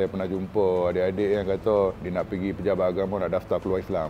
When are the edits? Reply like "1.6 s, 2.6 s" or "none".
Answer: none

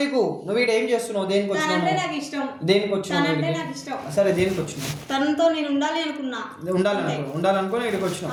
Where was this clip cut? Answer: none

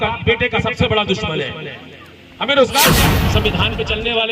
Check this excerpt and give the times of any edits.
3.2 s

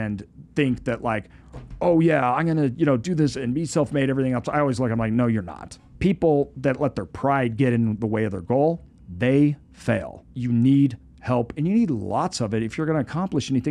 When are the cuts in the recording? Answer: none

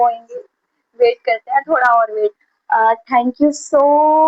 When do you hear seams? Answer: 2.5 s

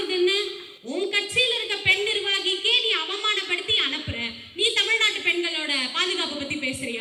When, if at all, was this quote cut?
none

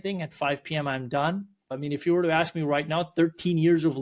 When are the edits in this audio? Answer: 1.7 s

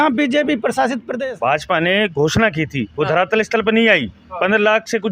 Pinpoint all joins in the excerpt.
1.1 s

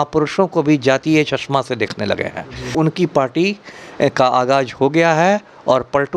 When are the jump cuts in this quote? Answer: 2.7 s

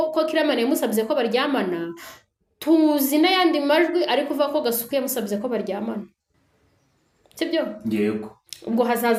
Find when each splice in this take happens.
none

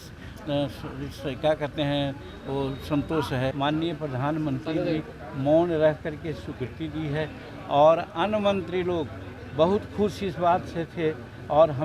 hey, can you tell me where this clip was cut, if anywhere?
3.5 s

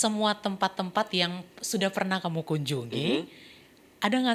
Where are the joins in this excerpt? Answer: none

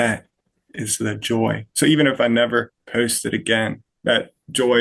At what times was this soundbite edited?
2.8 s, 3.9 s

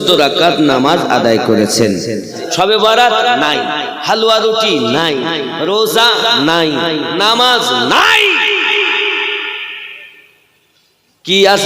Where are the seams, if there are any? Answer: 2.4 s

